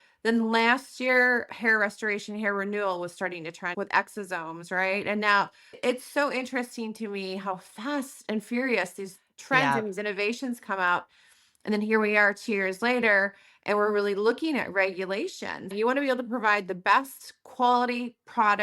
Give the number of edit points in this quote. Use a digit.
3